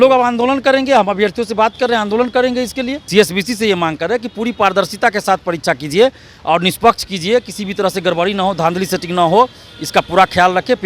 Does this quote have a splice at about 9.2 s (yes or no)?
no